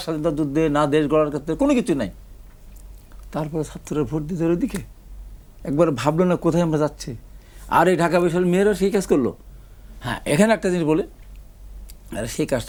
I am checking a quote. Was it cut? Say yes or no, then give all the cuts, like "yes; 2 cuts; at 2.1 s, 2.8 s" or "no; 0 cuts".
no; 0 cuts